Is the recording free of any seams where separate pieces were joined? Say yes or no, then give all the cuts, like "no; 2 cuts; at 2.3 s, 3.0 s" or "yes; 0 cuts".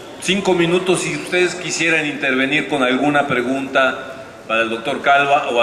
yes; 0 cuts